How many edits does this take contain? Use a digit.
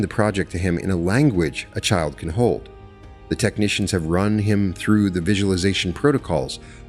0